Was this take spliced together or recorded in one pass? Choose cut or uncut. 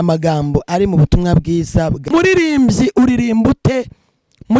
cut